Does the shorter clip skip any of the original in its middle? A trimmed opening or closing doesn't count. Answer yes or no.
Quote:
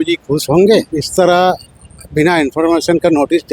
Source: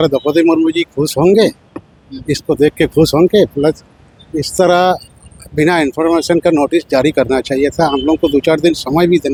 yes